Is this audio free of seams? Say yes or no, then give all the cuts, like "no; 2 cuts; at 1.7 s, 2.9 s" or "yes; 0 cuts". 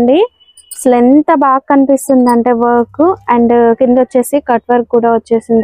yes; 0 cuts